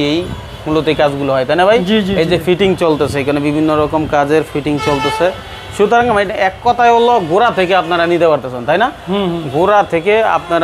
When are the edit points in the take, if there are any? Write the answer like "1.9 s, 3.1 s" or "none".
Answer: none